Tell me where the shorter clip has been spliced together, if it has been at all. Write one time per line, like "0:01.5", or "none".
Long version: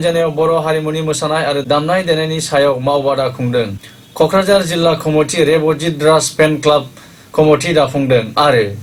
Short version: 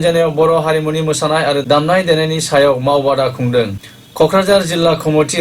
none

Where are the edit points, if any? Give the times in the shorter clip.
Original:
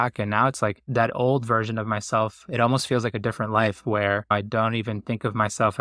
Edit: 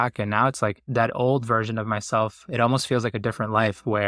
none

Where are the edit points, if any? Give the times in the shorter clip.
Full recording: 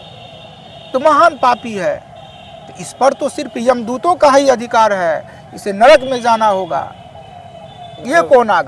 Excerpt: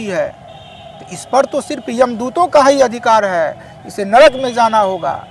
none

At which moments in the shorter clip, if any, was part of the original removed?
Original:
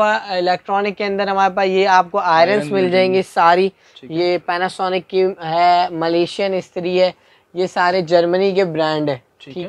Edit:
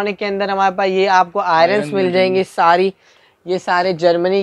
0:03.2

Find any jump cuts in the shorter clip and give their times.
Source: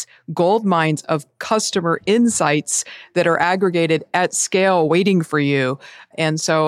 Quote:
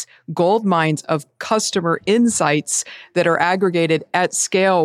none

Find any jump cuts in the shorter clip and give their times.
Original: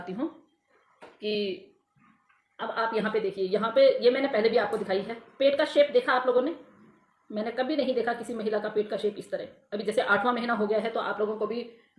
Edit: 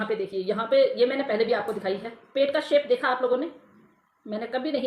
none

